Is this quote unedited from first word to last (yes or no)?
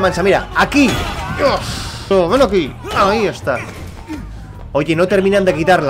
no